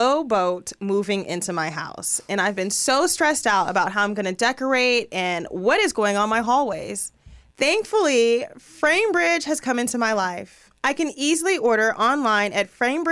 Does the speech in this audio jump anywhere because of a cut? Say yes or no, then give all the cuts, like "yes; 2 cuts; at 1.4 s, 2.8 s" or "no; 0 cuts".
no; 0 cuts